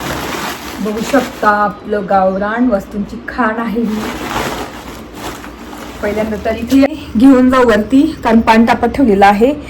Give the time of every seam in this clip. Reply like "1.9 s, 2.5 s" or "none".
6.9 s